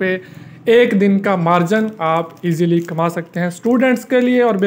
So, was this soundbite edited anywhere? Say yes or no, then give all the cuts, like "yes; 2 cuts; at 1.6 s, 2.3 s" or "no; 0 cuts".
no; 0 cuts